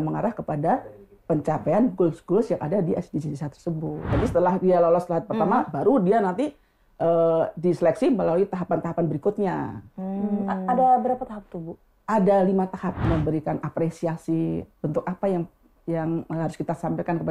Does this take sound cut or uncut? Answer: cut